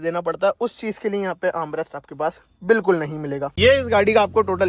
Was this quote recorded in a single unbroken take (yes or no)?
no